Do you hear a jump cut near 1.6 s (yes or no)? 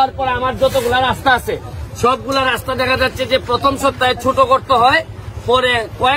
no